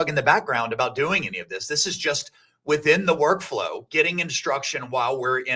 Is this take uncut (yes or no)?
yes